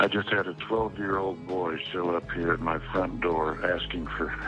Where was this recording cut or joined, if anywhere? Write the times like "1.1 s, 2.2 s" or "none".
none